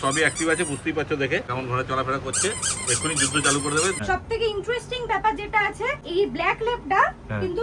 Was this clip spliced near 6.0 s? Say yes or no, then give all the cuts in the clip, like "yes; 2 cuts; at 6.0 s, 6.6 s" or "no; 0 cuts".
yes; 3 cuts; at 1.5 s, 4.0 s, 6.0 s